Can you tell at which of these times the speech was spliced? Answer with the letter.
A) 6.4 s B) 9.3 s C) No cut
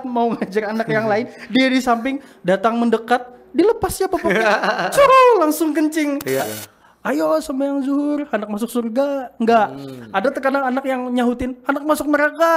A